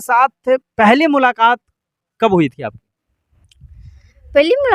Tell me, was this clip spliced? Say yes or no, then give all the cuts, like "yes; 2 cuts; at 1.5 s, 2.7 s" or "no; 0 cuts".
no; 0 cuts